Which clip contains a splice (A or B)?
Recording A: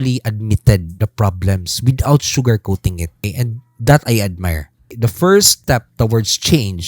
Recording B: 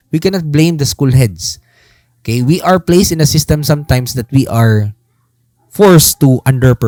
A